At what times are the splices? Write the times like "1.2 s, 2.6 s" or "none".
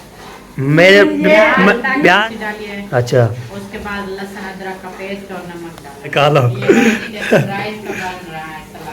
2.2 s, 6.1 s